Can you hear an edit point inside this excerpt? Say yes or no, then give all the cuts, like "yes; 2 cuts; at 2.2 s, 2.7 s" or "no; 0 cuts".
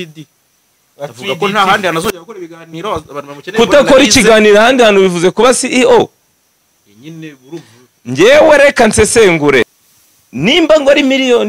yes; 1 cut; at 9.7 s